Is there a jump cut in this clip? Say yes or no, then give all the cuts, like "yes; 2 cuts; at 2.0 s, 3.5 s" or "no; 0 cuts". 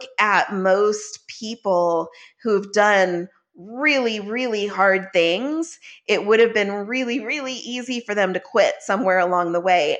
no; 0 cuts